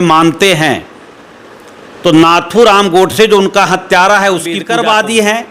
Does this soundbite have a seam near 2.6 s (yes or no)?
no